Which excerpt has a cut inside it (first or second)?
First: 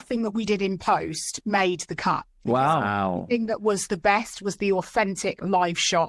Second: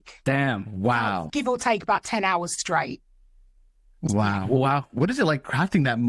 second